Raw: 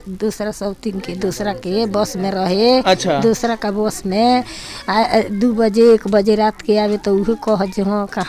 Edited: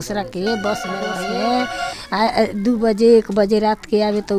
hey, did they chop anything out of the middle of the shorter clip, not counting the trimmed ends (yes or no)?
yes